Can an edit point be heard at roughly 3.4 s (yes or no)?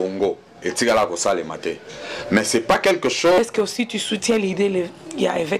yes